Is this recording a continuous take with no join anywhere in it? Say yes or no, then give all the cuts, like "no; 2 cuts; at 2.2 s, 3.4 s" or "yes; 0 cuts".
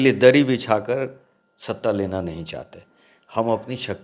yes; 0 cuts